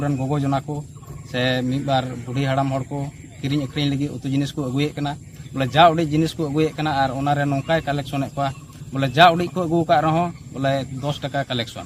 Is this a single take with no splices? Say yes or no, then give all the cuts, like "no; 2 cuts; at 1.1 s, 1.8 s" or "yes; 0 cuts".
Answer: yes; 0 cuts